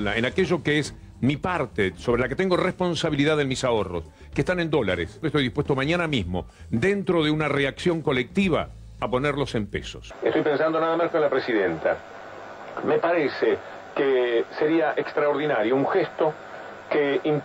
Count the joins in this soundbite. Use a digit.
2